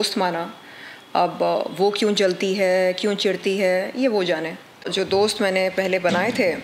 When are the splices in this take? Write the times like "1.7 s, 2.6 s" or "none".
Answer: 4.9 s

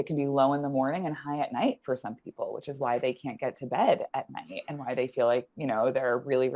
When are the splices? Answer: none

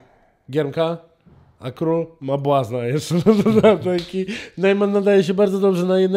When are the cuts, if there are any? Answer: none

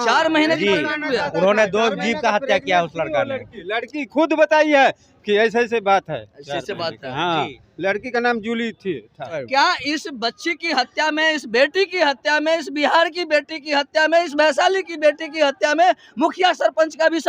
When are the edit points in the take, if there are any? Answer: 3.6 s, 9.4 s

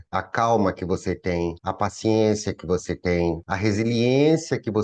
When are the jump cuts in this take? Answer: none

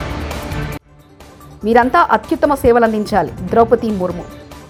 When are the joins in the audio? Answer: none

